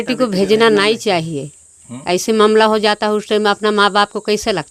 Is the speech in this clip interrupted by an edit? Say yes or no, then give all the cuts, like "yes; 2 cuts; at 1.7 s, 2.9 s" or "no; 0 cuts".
no; 0 cuts